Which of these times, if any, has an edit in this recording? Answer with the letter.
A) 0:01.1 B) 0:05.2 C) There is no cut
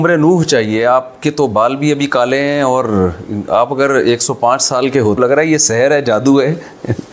B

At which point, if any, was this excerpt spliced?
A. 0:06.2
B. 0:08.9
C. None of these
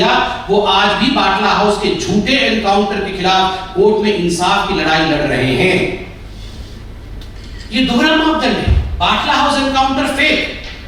C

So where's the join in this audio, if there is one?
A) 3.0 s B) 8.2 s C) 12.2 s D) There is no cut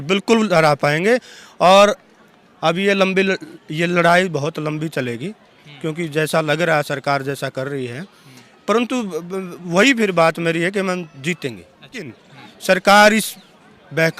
C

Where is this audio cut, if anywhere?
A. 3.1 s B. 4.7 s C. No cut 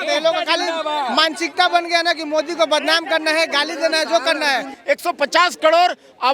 B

